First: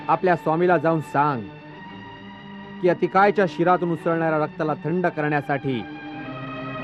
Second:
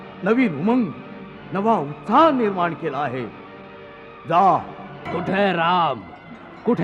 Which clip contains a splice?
second; 1 cut; at 5.1 s

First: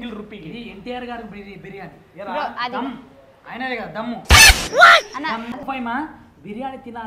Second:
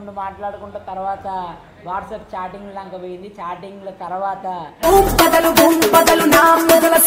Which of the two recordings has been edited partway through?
first; 1 cut; at 5.5 s

